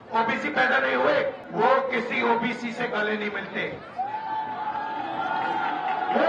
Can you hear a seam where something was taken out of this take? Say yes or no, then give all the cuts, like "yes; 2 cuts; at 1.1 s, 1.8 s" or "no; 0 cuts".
yes; 1 cut; at 1.4 s